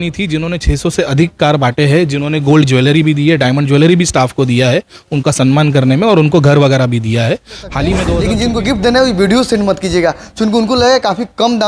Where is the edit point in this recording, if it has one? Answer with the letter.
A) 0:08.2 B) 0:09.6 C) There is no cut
A